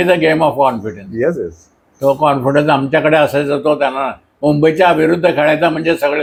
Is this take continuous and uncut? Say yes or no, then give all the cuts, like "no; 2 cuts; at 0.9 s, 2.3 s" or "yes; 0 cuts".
yes; 0 cuts